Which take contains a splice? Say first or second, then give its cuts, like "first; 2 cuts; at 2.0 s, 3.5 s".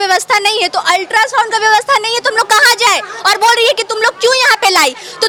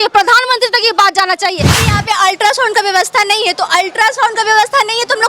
second; 1 cut; at 1.8 s